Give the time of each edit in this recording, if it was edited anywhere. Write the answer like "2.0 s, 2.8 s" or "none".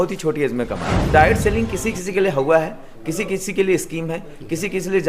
1.1 s